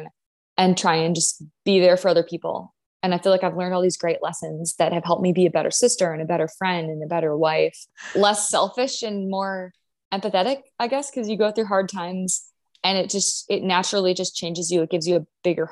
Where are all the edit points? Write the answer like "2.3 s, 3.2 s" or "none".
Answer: 8.0 s

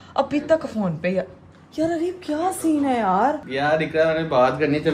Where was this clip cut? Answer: 3.5 s

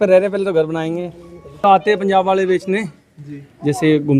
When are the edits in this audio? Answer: 1.6 s

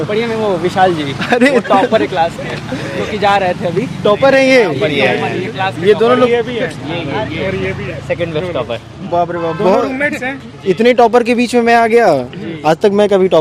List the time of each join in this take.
none

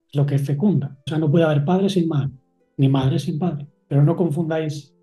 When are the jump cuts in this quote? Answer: 1.0 s, 3.7 s

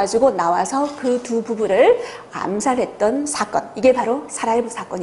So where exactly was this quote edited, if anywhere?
none

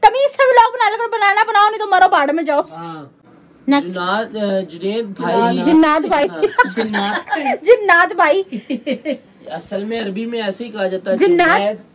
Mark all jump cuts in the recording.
3.1 s, 6.2 s

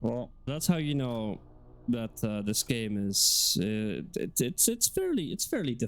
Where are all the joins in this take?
none

